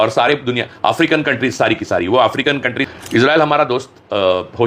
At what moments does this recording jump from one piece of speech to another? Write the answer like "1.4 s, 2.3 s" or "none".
2.9 s